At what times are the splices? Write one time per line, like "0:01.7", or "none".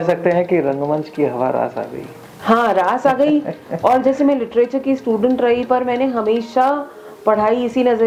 none